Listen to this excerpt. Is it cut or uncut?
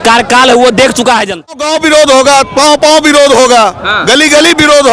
cut